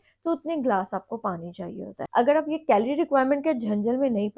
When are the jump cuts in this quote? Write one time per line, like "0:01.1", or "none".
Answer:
none